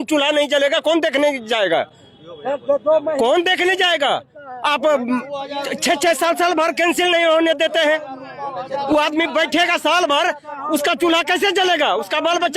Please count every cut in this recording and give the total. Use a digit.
0